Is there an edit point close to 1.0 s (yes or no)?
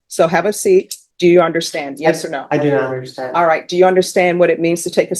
yes